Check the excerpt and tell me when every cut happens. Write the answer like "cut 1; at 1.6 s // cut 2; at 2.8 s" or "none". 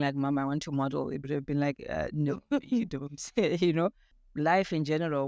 cut 1; at 4.1 s